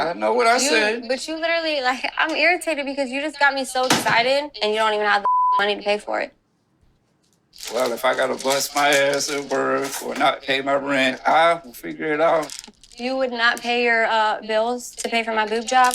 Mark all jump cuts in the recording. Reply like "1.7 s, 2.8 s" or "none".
none